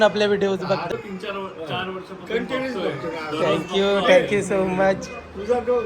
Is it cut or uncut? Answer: cut